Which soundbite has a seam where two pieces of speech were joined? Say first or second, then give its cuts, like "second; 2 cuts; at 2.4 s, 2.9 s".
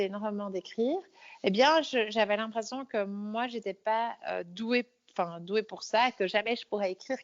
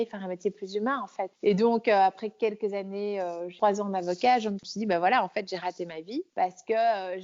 second; 4 cuts; at 1.3 s, 3.5 s, 4.7 s, 6.3 s